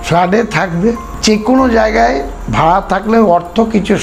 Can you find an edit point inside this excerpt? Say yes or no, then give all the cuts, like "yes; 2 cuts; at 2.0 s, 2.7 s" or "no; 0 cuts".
yes; 1 cut; at 1.1 s